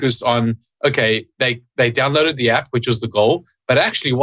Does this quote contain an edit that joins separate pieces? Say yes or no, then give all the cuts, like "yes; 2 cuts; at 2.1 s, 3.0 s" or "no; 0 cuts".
no; 0 cuts